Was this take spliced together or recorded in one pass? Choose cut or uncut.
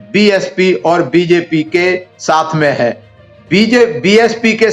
uncut